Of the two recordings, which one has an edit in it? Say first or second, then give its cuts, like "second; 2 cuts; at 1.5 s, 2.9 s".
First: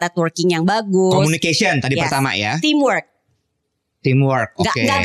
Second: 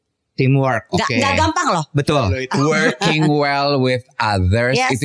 second; 1 cut; at 2.4 s